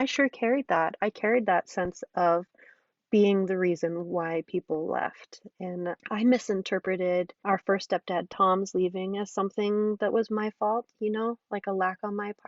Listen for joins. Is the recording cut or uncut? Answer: cut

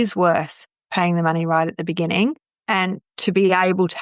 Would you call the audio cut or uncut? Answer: cut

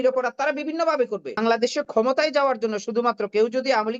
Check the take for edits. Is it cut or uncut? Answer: cut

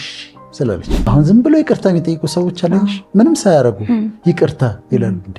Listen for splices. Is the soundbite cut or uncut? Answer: cut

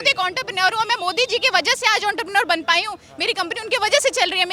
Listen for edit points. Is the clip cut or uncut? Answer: uncut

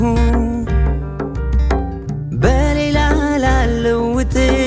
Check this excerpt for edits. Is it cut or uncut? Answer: uncut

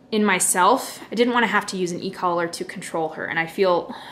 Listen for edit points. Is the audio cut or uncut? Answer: uncut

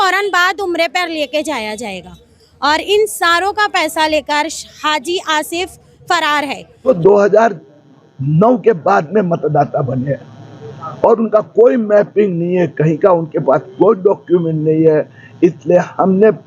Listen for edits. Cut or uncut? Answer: cut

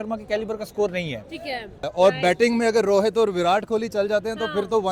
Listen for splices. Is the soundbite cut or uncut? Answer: cut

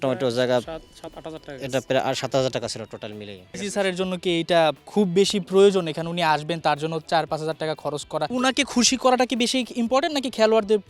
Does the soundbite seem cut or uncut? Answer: cut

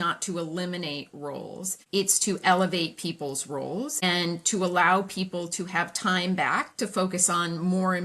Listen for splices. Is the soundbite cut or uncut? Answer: cut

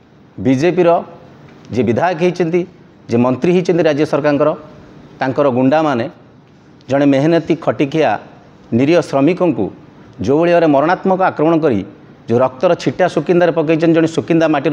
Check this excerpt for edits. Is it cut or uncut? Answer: uncut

